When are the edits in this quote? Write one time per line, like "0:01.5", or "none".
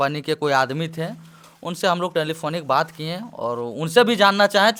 none